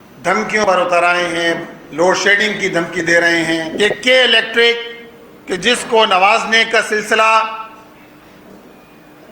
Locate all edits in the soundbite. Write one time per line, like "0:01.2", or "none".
0:03.7

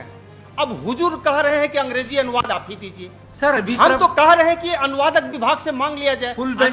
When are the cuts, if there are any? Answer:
none

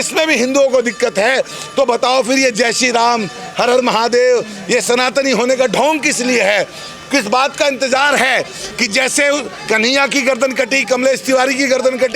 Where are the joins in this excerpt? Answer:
none

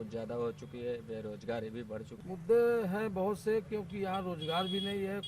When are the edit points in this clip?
0:02.1

